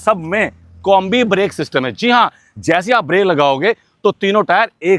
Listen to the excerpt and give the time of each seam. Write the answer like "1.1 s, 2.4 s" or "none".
none